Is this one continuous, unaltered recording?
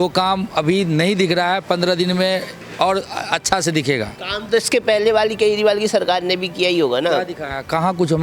yes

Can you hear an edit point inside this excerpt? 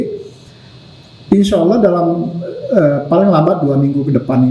no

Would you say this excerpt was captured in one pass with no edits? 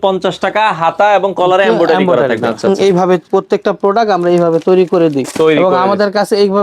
no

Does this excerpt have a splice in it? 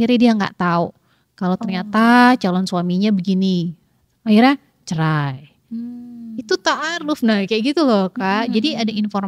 no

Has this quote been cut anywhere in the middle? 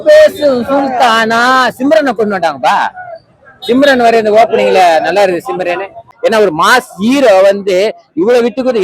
yes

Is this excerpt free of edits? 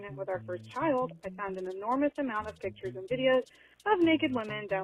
yes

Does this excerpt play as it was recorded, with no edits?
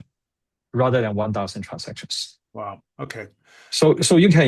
yes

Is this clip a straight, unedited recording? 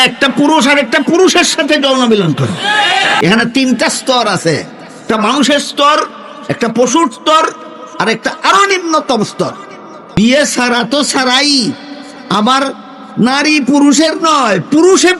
no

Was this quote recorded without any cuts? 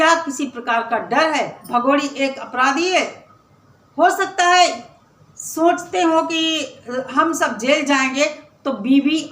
no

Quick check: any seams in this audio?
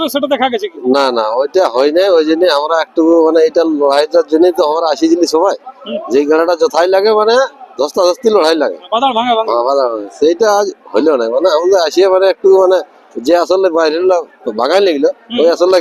no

